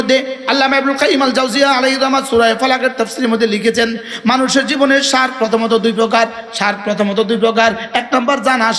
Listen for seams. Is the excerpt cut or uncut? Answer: uncut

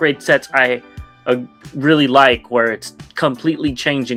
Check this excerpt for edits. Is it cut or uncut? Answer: uncut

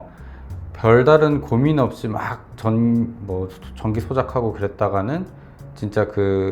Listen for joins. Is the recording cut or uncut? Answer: uncut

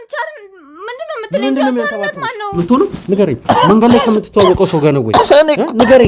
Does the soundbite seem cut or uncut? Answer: cut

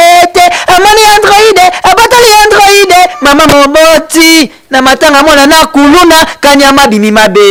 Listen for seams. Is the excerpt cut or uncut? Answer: uncut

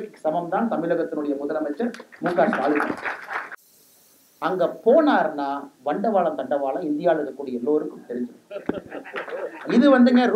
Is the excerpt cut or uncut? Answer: cut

